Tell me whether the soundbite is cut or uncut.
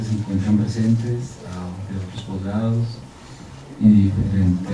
cut